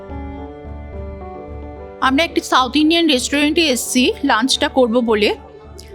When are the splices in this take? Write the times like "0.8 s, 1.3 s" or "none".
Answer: 2.0 s